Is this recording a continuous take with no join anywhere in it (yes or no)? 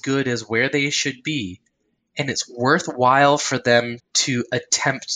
no